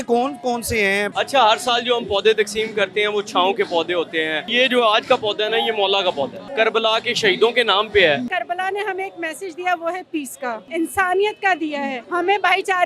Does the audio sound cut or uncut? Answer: cut